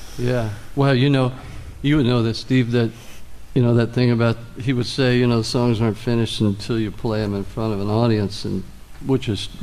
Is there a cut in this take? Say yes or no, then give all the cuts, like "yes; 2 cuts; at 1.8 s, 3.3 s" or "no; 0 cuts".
no; 0 cuts